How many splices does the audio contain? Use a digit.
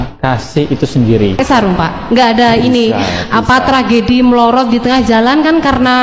1